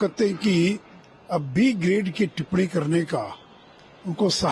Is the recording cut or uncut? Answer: uncut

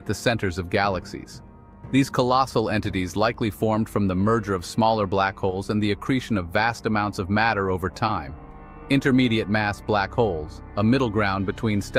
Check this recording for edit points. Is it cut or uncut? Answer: uncut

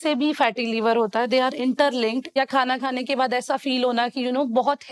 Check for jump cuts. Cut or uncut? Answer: cut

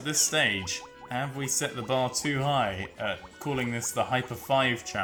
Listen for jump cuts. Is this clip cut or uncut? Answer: uncut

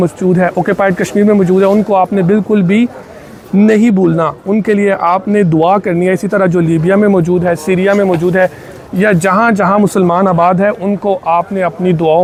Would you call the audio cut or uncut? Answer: uncut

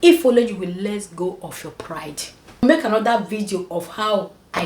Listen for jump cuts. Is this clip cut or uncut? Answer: cut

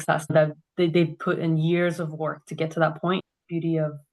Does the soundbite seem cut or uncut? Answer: cut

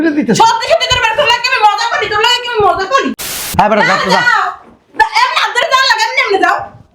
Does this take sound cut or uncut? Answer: cut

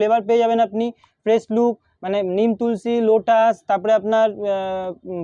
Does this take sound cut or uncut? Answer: uncut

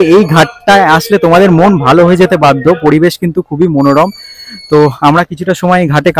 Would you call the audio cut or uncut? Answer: uncut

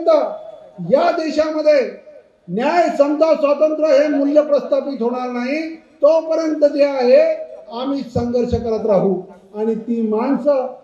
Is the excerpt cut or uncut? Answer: uncut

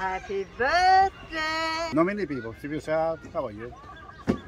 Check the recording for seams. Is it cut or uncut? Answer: cut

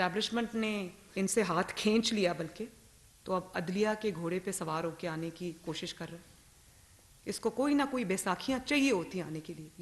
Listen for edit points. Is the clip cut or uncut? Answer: cut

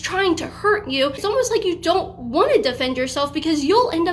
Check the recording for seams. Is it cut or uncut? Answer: cut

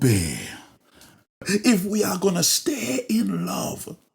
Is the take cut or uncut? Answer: cut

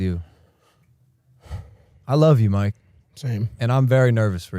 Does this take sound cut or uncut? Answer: uncut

